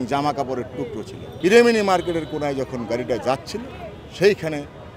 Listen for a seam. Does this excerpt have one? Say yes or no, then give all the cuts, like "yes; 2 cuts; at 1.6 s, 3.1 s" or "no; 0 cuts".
yes; 1 cut; at 1.2 s